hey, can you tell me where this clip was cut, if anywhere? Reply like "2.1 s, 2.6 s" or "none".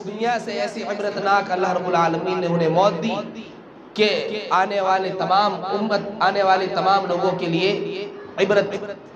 none